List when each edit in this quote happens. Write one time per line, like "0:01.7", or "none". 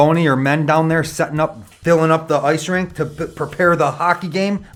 none